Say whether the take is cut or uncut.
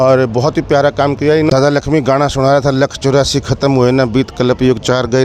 cut